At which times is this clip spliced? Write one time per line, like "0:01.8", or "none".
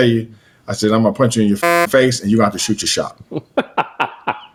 none